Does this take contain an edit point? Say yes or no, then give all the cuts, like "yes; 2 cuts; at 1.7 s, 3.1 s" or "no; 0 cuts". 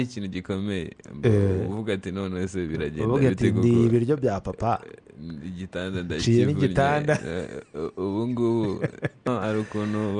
yes; 1 cut; at 9.3 s